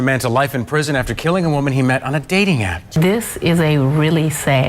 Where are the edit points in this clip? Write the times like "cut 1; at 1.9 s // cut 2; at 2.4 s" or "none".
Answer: cut 1; at 3.0 s